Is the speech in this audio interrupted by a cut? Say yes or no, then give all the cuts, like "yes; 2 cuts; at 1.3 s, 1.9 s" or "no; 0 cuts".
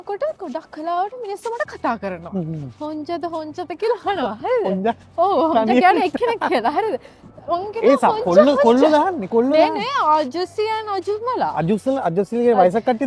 no; 0 cuts